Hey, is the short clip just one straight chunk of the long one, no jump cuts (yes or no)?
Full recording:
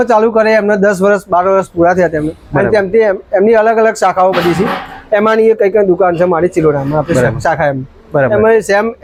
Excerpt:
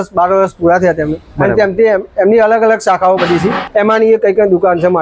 no